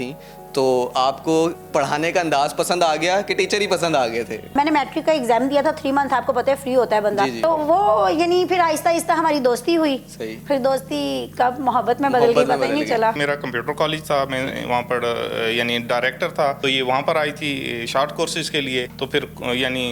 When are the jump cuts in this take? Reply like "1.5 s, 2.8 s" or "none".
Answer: 1.6 s, 4.5 s, 7.4 s, 13.2 s, 16.6 s, 18.9 s